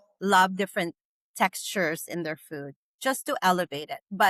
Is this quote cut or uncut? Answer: uncut